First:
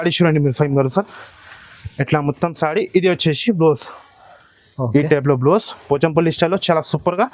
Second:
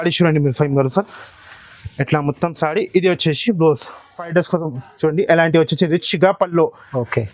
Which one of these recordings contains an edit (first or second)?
second